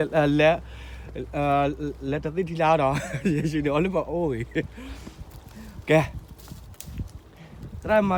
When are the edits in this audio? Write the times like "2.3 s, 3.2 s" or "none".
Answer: none